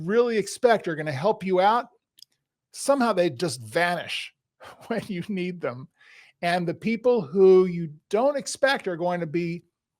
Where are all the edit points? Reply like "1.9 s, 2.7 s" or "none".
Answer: none

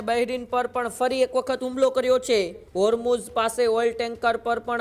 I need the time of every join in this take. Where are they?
2.6 s

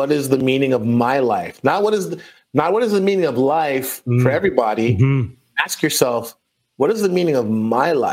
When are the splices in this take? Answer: none

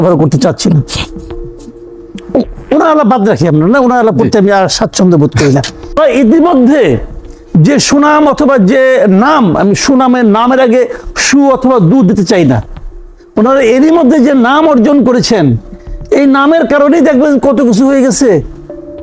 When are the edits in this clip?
1.1 s, 2.3 s, 5.8 s

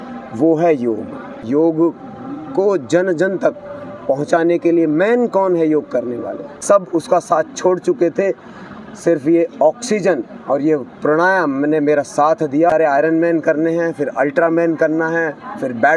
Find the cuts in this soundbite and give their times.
1.5 s, 6.5 s, 12.7 s

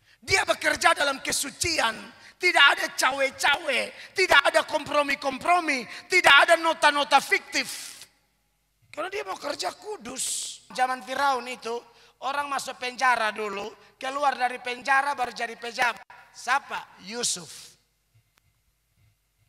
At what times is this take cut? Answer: 10.7 s

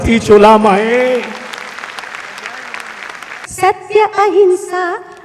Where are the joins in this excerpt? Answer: 3.4 s

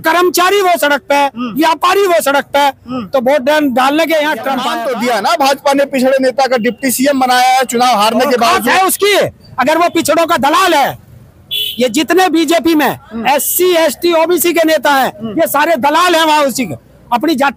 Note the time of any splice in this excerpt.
4.7 s

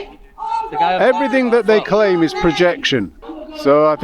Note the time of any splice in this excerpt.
3.1 s

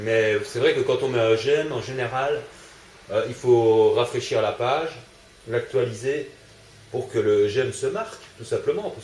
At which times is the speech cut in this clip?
5.8 s

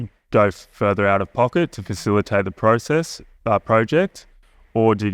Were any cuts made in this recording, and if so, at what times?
none

